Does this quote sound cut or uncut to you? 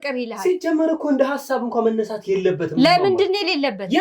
uncut